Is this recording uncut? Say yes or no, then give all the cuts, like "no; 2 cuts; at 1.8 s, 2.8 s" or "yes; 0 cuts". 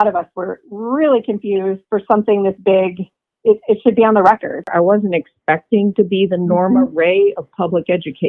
no; 2 cuts; at 1.8 s, 4.7 s